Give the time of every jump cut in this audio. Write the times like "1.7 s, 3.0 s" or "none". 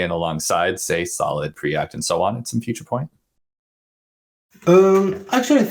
none